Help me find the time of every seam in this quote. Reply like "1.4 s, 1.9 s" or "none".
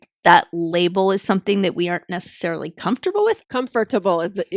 3.4 s